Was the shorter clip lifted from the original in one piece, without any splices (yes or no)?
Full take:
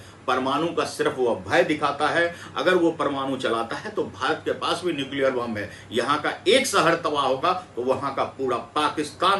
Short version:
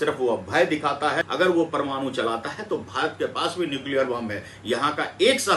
no